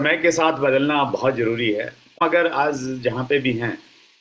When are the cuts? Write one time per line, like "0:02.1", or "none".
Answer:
0:02.2